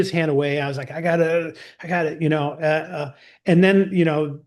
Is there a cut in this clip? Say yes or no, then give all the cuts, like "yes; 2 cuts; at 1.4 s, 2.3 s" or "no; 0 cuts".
no; 0 cuts